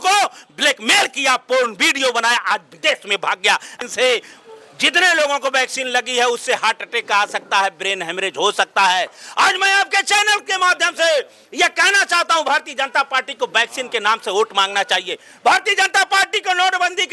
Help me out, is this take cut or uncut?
cut